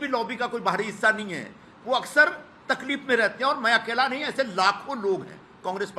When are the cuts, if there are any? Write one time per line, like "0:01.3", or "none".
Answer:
none